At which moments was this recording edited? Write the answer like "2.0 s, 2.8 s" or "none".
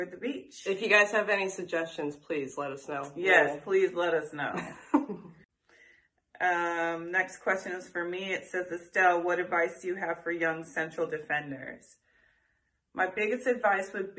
5.5 s